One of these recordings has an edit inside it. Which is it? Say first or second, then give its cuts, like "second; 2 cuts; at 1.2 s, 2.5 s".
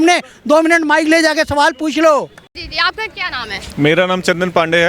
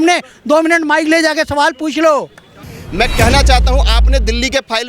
second; 1 cut; at 2.7 s